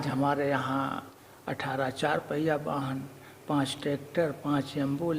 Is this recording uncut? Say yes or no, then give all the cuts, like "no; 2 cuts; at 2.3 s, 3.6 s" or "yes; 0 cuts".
no; 1 cut; at 1.1 s